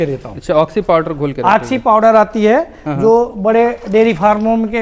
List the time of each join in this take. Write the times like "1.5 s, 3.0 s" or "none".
none